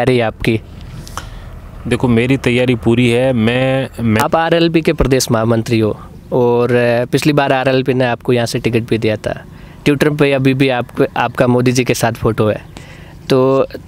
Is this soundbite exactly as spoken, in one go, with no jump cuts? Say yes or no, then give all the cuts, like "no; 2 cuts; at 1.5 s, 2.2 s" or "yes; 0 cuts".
no; 1 cut; at 4.2 s